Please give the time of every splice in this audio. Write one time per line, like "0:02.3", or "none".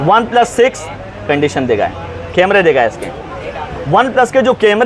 none